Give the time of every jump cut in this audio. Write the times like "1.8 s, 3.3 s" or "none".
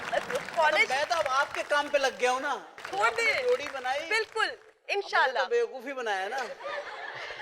2.8 s